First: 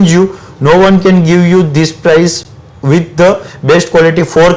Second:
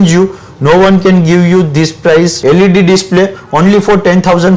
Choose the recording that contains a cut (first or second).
second